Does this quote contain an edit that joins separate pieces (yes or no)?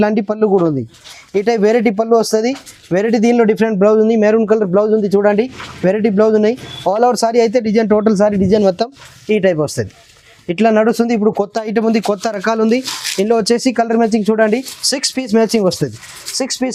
no